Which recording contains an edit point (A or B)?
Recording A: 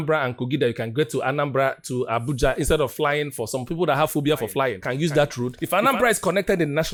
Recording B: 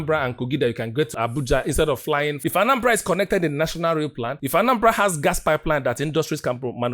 B